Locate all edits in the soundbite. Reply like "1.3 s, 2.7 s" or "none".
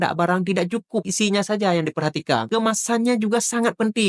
1.1 s, 2.5 s